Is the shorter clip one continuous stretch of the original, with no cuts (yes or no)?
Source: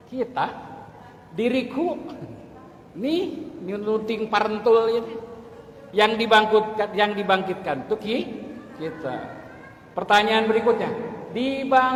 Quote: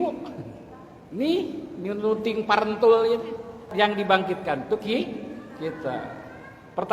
no